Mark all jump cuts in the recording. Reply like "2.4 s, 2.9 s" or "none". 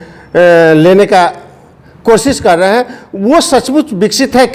none